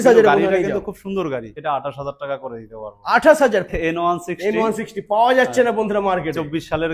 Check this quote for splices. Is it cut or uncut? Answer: cut